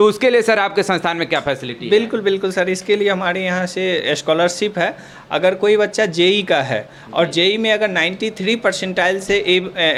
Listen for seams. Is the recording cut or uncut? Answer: uncut